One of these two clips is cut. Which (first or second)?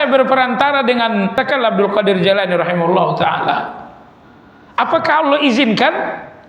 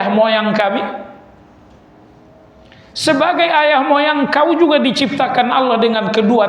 first